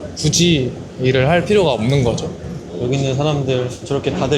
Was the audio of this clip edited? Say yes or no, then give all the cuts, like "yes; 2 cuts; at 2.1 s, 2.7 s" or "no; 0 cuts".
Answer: yes; 1 cut; at 2.6 s